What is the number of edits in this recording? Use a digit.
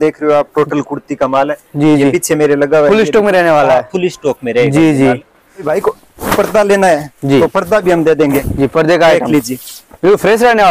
1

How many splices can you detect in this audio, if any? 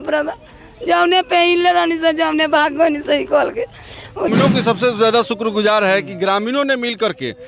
1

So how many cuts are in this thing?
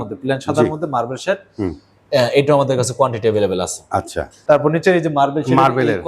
1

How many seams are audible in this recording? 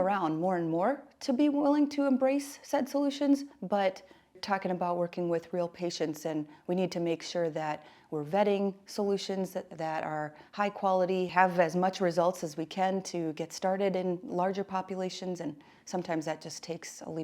2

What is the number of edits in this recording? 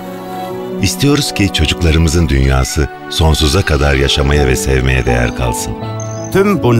0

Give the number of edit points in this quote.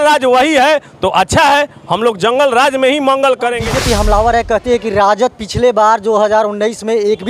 1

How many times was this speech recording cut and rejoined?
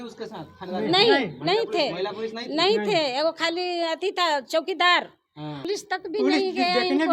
1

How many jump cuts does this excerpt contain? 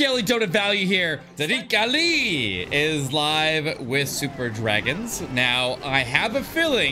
1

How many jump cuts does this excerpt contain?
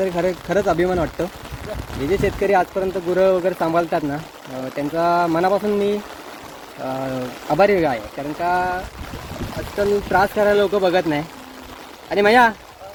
0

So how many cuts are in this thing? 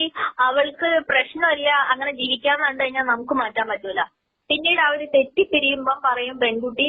1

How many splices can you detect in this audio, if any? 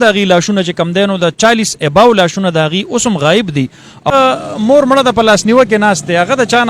1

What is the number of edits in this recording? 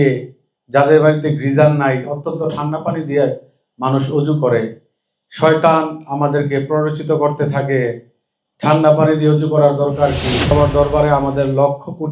1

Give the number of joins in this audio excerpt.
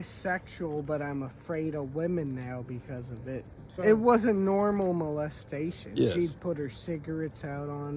1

